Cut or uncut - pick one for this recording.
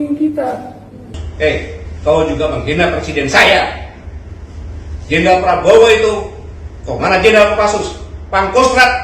cut